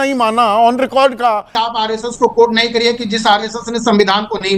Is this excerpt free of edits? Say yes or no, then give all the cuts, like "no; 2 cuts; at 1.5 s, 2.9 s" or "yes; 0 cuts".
no; 1 cut; at 1.6 s